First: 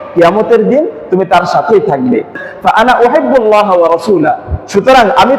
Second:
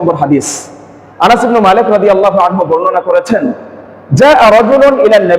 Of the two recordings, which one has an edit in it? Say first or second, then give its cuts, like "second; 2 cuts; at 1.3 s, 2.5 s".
first; 1 cut; at 2.4 s